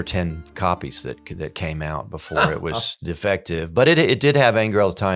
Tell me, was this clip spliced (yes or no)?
yes